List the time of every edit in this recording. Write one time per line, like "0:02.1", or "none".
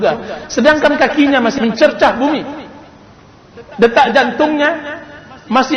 0:01.5